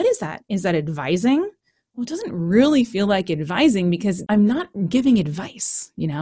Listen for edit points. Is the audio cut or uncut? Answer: cut